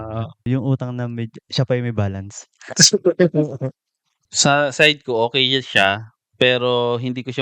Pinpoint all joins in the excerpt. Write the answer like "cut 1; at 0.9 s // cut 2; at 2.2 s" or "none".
cut 1; at 4.3 s